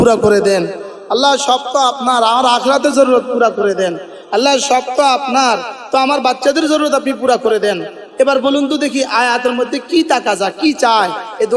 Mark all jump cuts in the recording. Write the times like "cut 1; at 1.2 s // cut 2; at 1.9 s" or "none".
none